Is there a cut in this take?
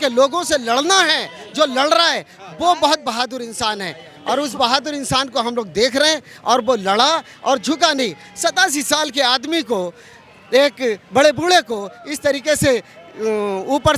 no; 0 cuts

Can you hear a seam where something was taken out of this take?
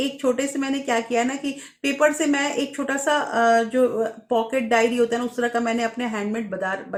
no; 0 cuts

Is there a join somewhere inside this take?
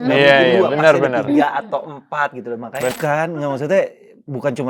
yes; 1 cut; at 2.9 s

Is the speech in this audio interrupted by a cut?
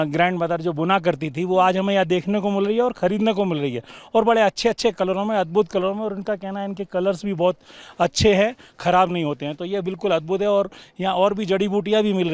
no; 0 cuts

